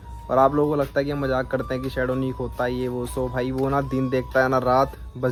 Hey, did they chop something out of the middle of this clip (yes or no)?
no